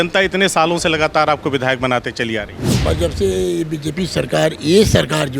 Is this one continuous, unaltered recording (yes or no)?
no